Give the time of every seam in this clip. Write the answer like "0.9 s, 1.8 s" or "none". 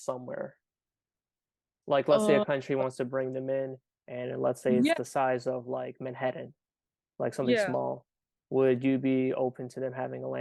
none